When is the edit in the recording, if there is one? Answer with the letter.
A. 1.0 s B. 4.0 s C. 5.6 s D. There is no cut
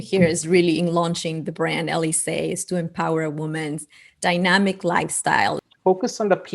C